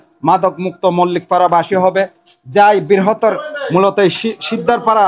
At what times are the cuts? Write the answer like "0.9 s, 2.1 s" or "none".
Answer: none

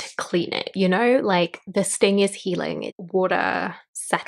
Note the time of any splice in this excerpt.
2.9 s

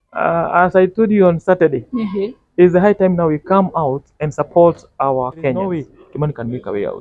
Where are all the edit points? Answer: 6.0 s

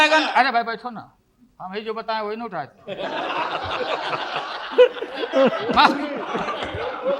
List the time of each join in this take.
none

